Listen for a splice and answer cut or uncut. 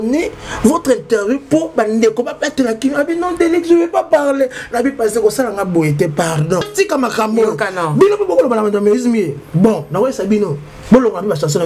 cut